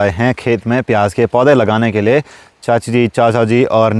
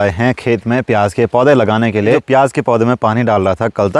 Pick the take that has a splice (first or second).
second